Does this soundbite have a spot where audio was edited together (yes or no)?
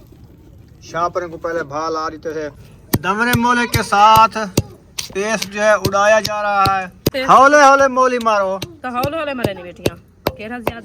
yes